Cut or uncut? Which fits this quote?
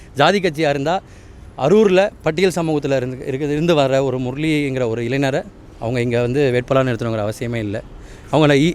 uncut